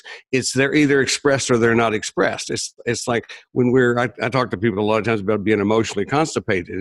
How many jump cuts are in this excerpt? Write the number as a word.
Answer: zero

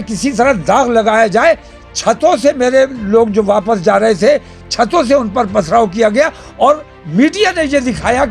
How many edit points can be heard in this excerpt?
zero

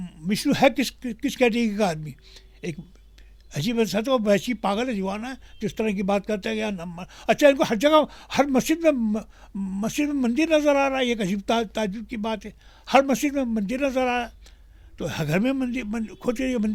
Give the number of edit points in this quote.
zero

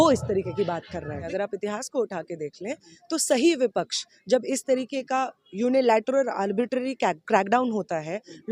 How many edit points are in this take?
zero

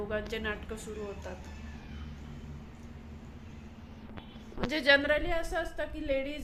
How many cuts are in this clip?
zero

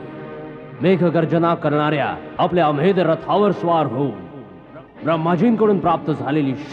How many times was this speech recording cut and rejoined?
zero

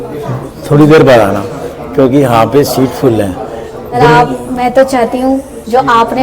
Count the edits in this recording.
one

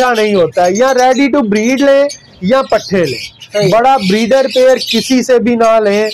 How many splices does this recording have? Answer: zero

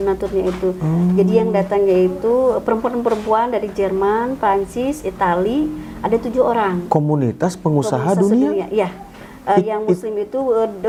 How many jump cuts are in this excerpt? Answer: zero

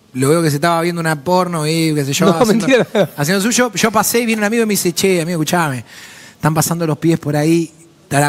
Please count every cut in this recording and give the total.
zero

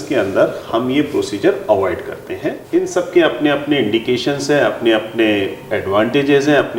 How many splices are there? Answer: one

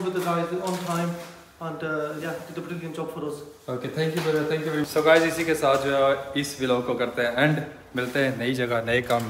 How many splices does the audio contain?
zero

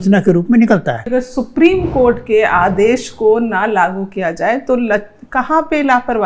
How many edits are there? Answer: one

